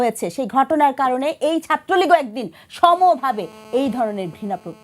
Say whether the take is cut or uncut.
uncut